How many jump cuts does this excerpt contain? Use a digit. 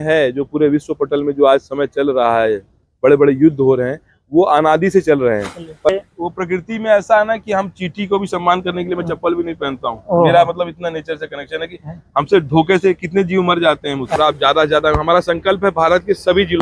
2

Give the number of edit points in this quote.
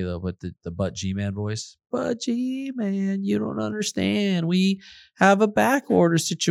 0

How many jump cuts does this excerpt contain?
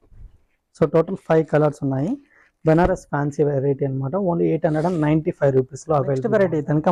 0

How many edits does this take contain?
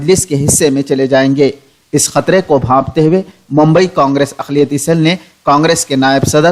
0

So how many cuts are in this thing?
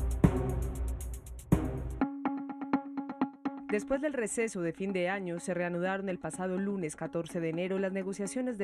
1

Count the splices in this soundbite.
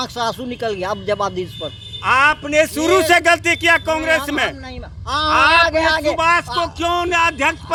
0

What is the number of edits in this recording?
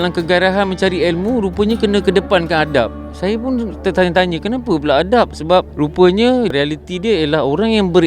1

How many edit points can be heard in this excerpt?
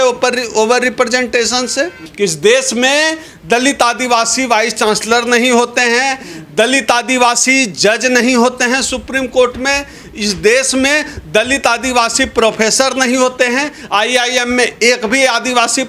1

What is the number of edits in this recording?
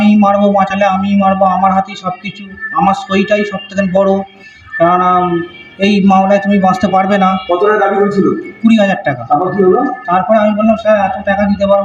0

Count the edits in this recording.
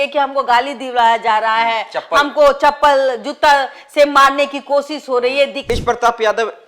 1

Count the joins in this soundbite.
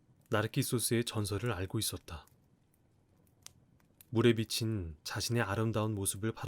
2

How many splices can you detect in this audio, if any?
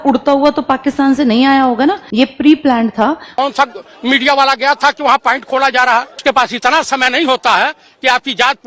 2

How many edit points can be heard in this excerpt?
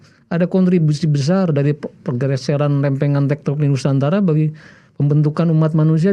0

